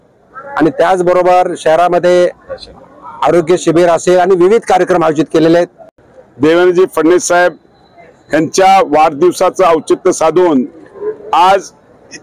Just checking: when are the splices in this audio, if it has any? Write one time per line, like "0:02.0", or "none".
0:05.9